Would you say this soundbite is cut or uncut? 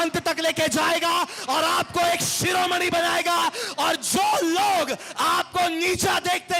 uncut